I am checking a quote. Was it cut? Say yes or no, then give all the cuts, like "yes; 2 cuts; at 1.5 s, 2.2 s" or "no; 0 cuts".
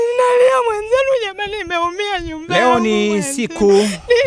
no; 0 cuts